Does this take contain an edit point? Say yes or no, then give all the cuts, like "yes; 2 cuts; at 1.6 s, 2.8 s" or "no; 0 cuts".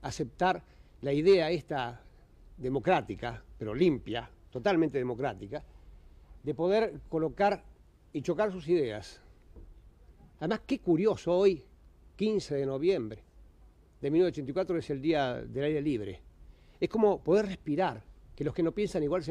yes; 1 cut; at 12.1 s